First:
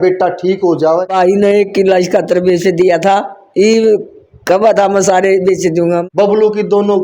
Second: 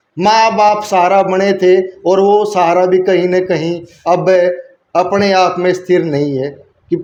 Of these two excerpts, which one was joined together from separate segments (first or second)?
first